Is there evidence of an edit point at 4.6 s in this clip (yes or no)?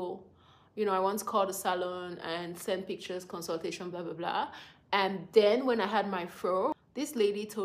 no